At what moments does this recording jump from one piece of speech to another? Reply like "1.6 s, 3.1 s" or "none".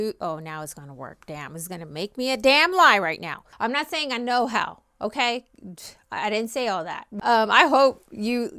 3.4 s, 7.0 s